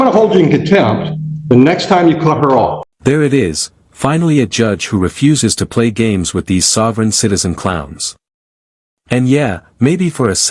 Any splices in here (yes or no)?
no